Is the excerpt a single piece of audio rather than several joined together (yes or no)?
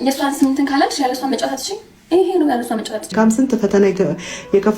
no